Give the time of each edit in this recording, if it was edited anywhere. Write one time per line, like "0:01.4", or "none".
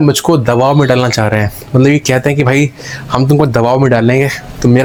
none

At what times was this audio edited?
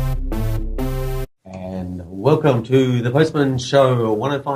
0:01.3

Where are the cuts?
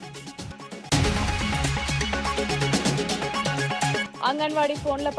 0:02.8
0:04.1

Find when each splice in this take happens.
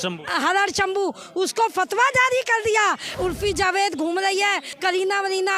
0:03.1
0:04.7

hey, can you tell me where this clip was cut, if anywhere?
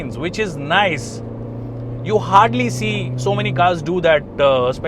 none

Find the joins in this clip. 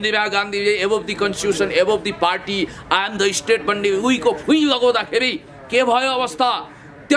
none

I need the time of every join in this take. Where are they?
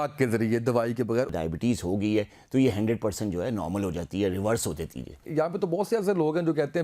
0:01.3
0:05.3

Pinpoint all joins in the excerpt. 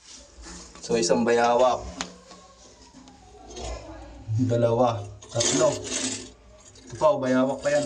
none

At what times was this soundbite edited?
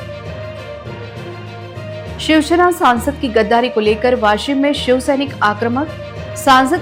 none

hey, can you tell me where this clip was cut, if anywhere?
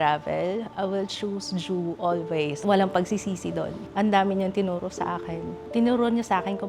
0:02.6
0:03.8
0:05.6

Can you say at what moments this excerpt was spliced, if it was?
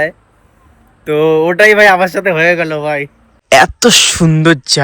0:03.4

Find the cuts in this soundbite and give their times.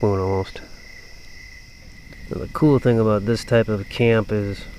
0:02.1

